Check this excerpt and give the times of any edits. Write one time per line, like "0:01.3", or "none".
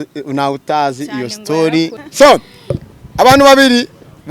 0:02.0